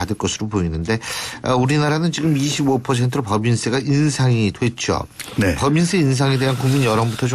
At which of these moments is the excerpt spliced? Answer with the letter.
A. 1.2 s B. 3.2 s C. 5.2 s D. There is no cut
A